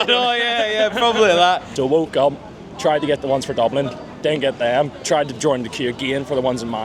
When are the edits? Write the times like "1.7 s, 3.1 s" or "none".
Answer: 1.7 s